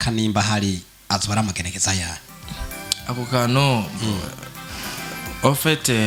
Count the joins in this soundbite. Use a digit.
0